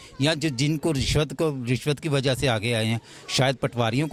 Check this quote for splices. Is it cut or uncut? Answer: uncut